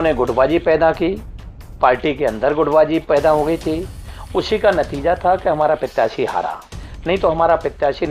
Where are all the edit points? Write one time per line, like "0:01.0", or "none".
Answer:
none